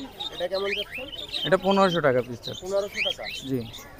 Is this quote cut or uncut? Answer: uncut